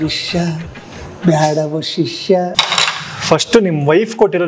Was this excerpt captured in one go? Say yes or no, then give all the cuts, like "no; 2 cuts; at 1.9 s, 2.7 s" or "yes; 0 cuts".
no; 1 cut; at 2.6 s